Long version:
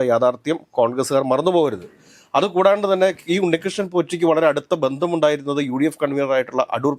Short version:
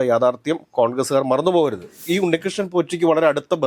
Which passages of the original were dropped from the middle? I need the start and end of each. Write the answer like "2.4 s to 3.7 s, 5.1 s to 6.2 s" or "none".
2.0 s to 3.2 s